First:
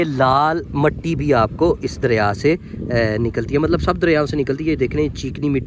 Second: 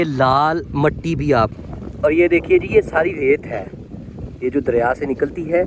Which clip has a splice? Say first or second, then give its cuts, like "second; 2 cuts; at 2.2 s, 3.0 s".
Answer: second; 1 cut; at 1.5 s